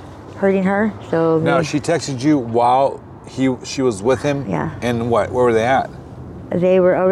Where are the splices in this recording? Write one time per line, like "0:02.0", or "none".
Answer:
none